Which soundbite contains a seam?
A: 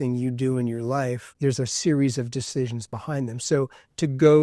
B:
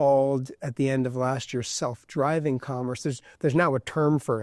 A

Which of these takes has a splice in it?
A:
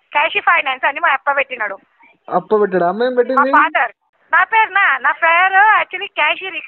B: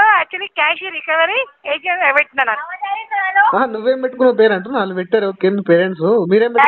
A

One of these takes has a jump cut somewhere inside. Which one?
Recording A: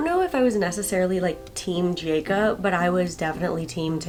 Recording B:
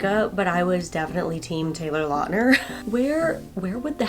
B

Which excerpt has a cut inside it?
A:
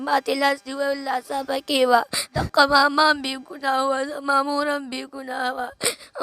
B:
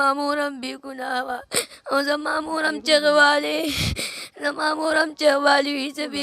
A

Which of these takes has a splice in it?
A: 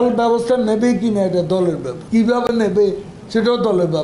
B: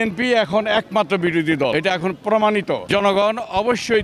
A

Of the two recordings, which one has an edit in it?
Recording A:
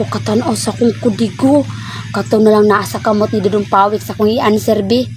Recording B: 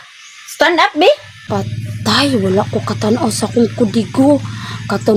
B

